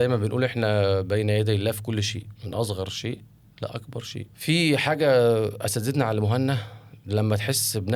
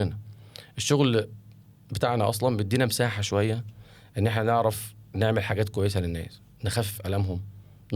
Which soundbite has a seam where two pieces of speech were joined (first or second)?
first